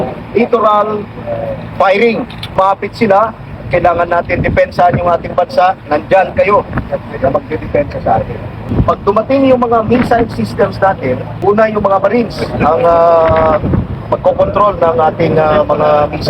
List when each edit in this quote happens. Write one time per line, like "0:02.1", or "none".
0:02.5
0:08.7
0:11.3